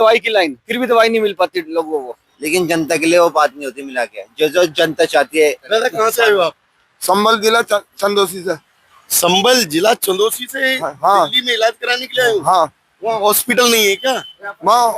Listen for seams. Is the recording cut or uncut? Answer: cut